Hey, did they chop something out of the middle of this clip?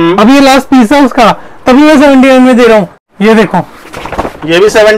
yes; 1 cut; at 3.0 s

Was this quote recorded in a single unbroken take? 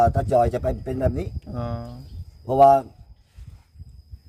yes; 0 cuts

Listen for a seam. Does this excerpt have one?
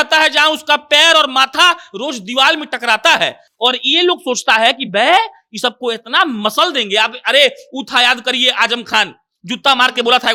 no; 0 cuts

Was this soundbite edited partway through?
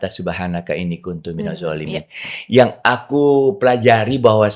no; 0 cuts

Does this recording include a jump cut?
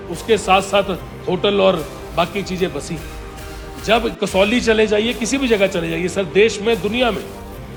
no; 0 cuts

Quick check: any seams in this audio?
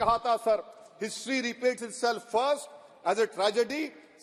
no; 0 cuts

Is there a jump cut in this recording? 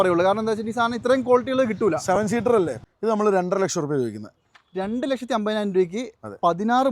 yes; 1 cut; at 2.8 s

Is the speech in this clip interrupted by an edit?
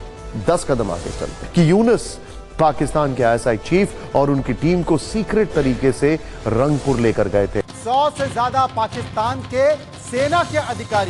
yes; 2 cuts; at 1.4 s, 7.6 s

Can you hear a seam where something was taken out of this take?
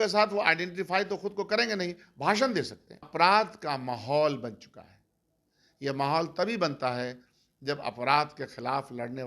yes; 1 cut; at 3.1 s

